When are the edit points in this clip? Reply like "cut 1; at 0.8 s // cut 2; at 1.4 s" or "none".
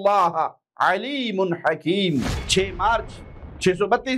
cut 1; at 2.4 s